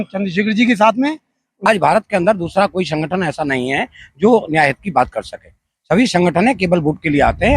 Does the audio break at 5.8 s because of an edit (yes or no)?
no